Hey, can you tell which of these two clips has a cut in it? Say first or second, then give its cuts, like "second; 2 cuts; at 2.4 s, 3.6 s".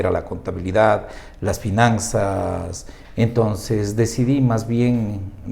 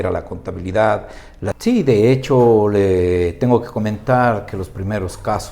second; 1 cut; at 1.6 s